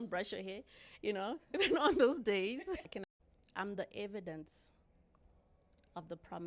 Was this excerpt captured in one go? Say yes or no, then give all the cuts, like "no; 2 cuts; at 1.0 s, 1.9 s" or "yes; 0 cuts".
no; 1 cut; at 3.0 s